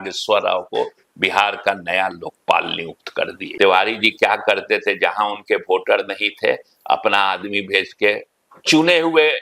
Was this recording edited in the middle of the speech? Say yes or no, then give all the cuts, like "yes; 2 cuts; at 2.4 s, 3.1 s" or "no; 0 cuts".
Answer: yes; 1 cut; at 3.4 s